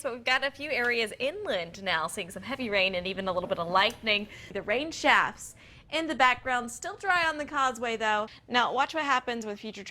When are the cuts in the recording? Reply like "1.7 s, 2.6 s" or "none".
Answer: 4.4 s, 8.4 s